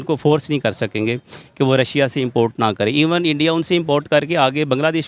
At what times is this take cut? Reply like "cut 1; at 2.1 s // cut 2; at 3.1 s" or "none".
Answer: cut 1; at 1.4 s